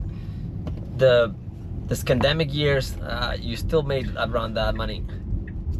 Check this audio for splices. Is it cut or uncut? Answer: uncut